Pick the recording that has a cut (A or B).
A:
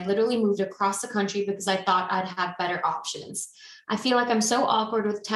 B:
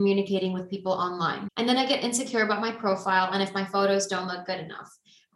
B